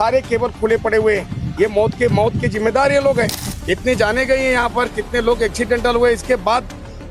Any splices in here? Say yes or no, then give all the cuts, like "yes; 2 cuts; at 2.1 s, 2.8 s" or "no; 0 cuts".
no; 0 cuts